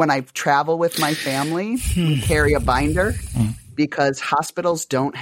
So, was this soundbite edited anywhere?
no; 0 cuts

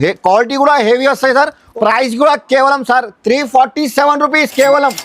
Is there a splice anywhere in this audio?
yes; 1 cut; at 1.6 s

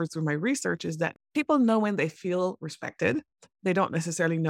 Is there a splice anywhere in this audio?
yes; 1 cut; at 1.2 s

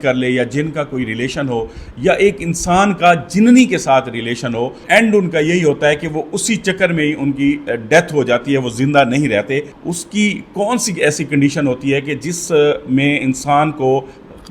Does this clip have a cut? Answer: yes; 2 cuts; at 4.8 s, 9.8 s

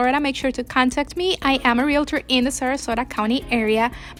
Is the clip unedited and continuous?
yes; 0 cuts

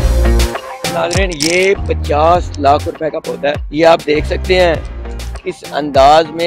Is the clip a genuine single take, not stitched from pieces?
no; 2 cuts; at 0.9 s, 3.6 s

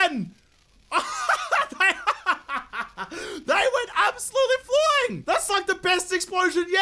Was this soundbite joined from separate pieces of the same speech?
yes; 1 cut; at 5.2 s

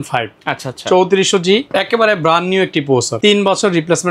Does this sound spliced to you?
yes; 2 cuts; at 1.7 s, 3.1 s

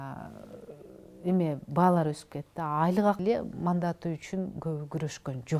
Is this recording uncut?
no; 1 cut; at 3.2 s

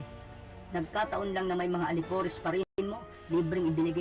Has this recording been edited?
yes; 1 cut; at 2.7 s

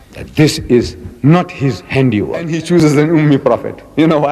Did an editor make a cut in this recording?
yes; 1 cut; at 2.7 s

